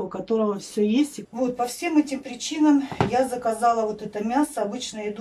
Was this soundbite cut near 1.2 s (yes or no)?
yes